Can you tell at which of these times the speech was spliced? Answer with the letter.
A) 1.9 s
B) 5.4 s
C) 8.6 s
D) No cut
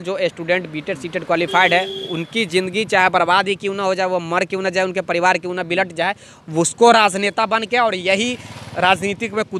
D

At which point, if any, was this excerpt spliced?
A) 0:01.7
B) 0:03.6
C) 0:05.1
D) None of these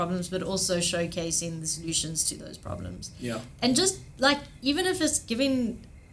D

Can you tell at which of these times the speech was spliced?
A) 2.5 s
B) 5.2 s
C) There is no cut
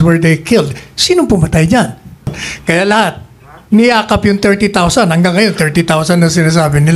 A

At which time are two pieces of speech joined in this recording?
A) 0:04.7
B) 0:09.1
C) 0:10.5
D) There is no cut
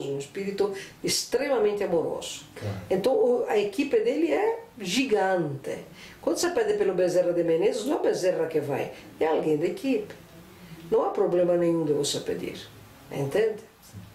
D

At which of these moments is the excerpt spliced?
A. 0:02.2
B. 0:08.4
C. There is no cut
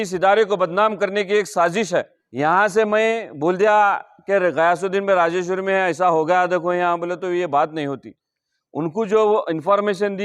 A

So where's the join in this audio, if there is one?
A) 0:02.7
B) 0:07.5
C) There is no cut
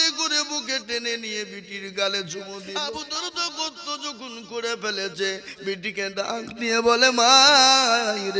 A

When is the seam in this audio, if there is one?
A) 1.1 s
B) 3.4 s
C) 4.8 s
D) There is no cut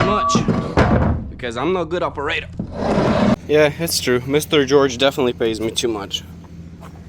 B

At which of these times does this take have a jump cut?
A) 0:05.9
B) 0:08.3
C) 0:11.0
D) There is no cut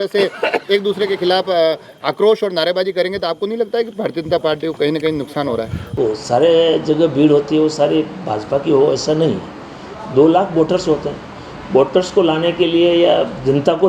A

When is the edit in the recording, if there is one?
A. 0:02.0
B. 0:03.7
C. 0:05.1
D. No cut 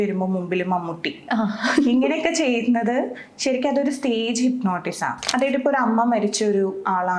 C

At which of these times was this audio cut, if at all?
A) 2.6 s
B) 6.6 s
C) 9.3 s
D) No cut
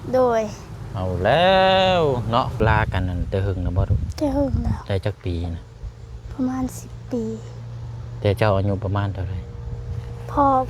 A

